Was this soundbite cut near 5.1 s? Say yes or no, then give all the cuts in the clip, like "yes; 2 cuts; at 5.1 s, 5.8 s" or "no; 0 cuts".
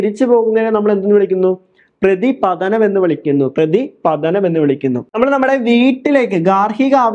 yes; 1 cut; at 5.1 s